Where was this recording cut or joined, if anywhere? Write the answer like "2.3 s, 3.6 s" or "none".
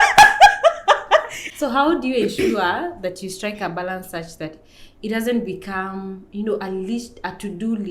1.3 s